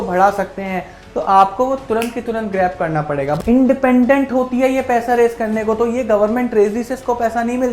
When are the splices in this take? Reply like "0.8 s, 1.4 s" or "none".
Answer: 3.4 s